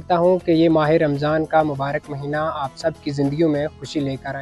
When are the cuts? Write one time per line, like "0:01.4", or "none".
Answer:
none

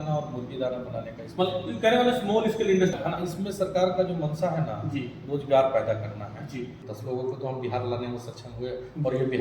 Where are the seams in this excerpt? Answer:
0:02.9
0:06.9

